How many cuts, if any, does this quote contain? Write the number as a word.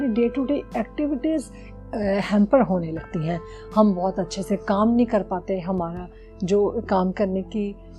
zero